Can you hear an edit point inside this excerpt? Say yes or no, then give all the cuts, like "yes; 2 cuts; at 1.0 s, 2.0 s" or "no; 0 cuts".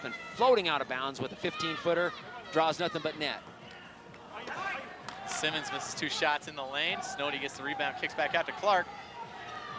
no; 0 cuts